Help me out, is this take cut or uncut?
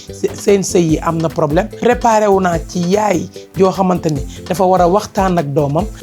uncut